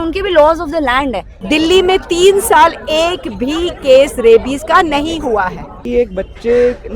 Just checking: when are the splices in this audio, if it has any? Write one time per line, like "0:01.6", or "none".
0:01.3
0:05.8